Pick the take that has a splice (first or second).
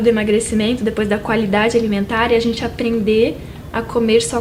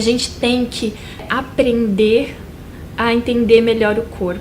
second